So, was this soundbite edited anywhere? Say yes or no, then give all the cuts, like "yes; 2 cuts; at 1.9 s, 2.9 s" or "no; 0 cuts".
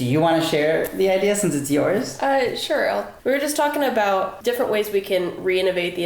yes; 2 cuts; at 3.1 s, 4.3 s